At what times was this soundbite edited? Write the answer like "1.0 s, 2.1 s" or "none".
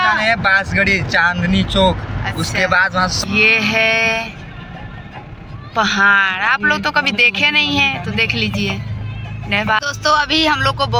3.2 s

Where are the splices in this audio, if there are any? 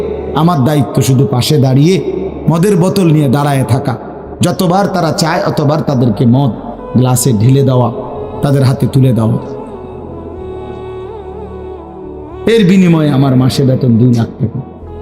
9.6 s, 12.4 s

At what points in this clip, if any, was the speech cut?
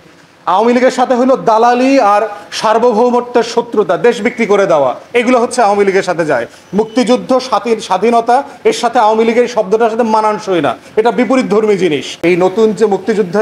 12.1 s

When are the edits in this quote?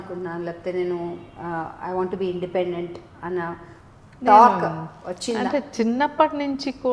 none

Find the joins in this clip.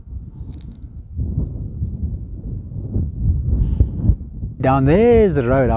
4.6 s

